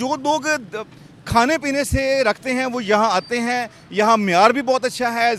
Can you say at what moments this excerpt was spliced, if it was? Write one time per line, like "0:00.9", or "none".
none

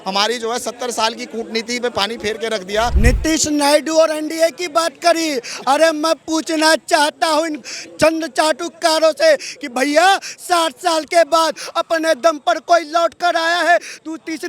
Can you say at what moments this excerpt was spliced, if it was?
0:02.9

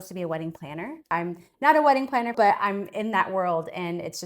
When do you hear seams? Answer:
0:01.1
0:02.3

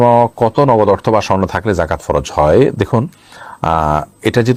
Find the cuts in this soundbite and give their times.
none

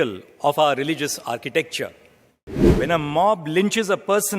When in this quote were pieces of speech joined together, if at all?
0:02.7

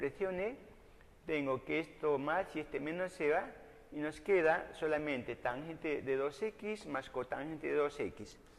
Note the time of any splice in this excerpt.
0:05.2

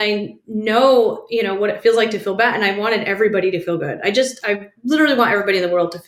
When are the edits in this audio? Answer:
none

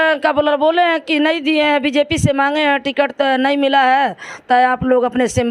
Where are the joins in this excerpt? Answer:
none

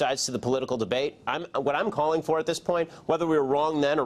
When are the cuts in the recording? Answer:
0:01.8

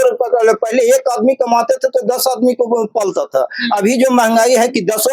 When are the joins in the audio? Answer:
none

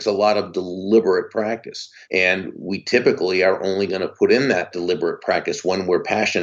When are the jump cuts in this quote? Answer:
0:04.7

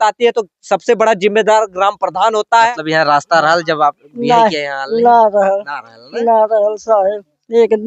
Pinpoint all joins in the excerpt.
0:02.7

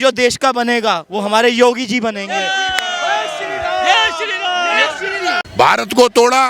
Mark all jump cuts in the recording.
0:05.5

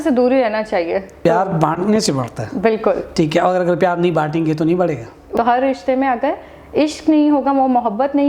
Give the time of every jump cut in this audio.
0:01.1
0:05.3

